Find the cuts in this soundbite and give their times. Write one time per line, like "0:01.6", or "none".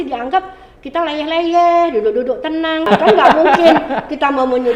0:02.9